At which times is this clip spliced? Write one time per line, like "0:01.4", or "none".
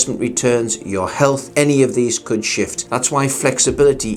none